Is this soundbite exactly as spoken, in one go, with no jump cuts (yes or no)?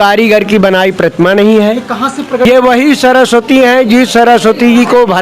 no